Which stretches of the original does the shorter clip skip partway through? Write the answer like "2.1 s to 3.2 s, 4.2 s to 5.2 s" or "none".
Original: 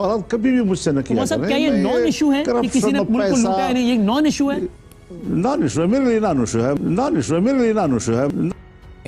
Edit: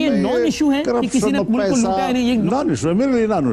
4.0 s to 5.4 s

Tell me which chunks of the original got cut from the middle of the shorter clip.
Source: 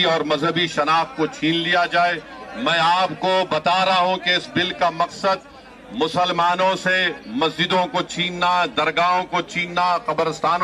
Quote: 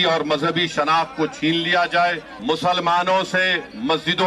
2.3 s to 5.8 s

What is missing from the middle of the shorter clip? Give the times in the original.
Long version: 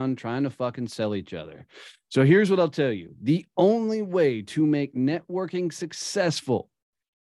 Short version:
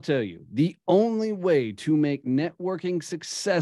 none

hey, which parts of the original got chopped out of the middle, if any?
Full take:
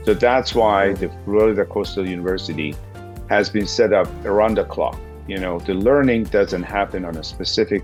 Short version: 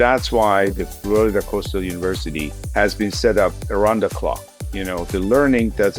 2.8 s to 3.1 s

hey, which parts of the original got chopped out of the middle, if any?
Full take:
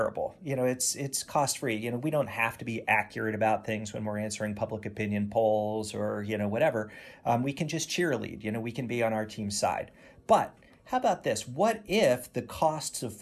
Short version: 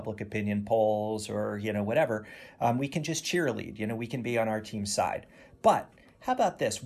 none

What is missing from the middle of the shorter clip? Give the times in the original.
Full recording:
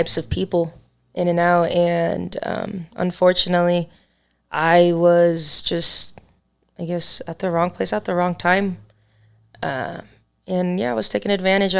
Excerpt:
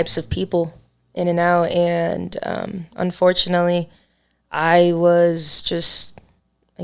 none

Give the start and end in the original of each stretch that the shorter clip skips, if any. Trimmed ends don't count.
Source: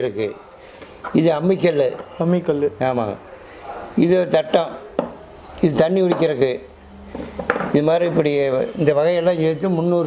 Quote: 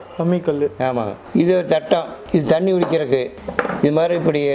3.2 s to 3.8 s, 4.8 s to 5.4 s, 6.7 s to 7.3 s

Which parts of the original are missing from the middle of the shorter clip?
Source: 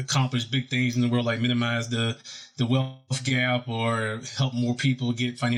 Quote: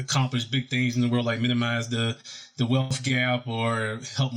2.9 s to 3.1 s

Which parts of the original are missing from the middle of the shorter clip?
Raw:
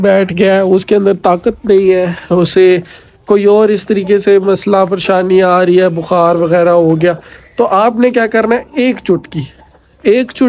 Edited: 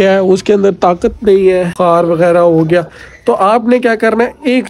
2.1 s to 6.0 s

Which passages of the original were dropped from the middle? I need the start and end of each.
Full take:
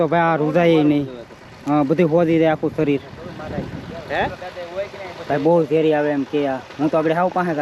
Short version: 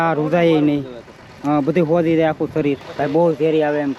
3.1 s to 5.2 s

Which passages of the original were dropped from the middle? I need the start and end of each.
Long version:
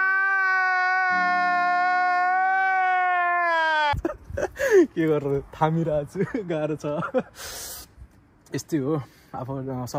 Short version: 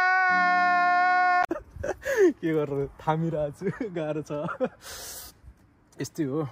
2.2 s to 4.0 s

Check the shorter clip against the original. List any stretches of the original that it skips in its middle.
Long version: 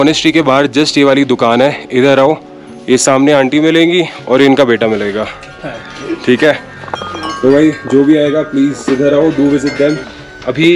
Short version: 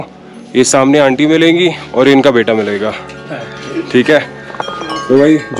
none

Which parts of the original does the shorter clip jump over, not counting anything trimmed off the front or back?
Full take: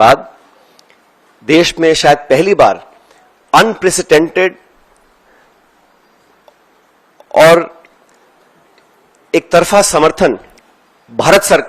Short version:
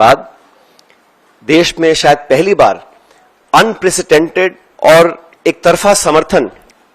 4.7 s to 7.2 s, 7.8 s to 9.1 s

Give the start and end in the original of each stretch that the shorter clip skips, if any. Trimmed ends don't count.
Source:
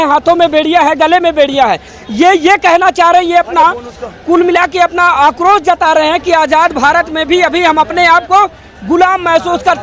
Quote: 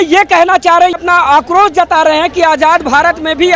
3.3 s to 4.9 s

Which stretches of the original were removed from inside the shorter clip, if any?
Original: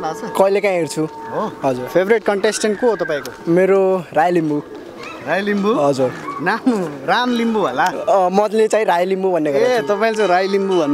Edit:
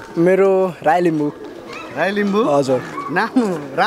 none

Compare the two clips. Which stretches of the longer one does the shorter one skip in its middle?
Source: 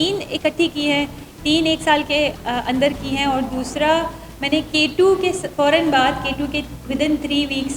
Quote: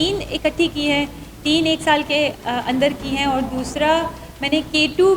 none

